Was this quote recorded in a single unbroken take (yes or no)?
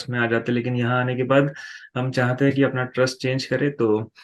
yes